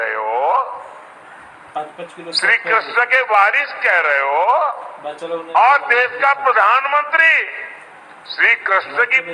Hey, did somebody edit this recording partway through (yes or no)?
no